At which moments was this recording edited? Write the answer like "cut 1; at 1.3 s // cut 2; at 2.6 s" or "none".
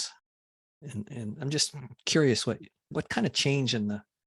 cut 1; at 2.8 s